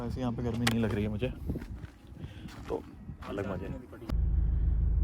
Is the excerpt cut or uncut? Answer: cut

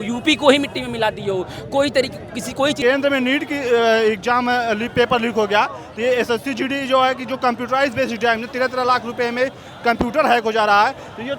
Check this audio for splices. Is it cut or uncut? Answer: cut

